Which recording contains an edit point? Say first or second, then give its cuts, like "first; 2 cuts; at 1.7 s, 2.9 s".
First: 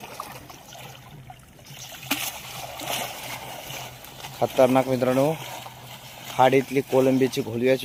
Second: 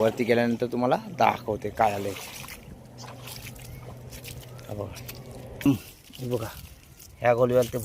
second; 1 cut; at 5.7 s